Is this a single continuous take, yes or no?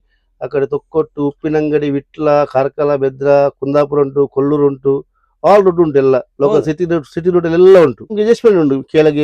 no